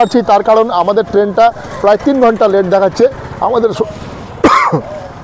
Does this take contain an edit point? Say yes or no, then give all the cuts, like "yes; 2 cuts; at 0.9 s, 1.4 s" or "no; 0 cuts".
no; 0 cuts